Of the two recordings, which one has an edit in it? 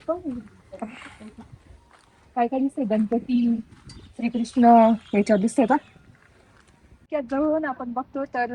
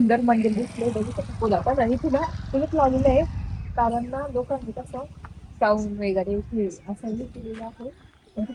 first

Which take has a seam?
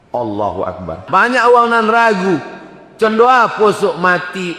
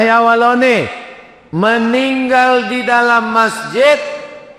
first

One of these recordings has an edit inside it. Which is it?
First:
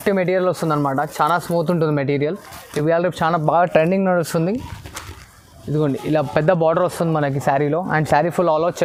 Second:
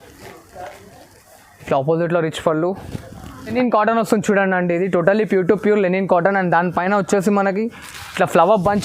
second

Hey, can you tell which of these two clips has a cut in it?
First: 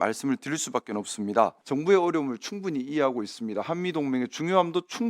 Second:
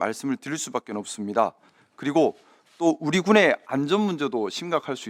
first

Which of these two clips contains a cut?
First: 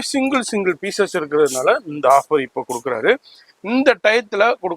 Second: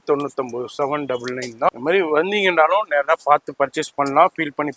second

